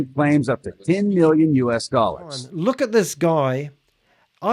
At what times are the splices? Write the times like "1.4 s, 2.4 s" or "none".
2.5 s